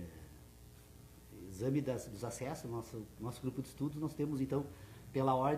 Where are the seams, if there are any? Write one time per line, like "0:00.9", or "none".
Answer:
0:01.7